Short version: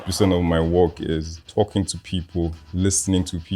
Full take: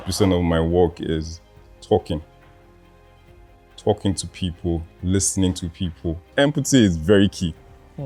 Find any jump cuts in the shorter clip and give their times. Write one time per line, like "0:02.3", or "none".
0:01.4